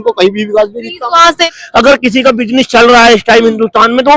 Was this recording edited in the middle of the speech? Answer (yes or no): yes